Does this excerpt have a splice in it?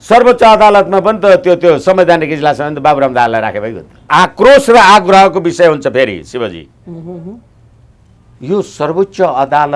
yes; 1 cut; at 4.1 s

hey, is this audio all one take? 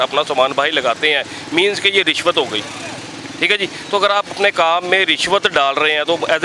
yes; 0 cuts

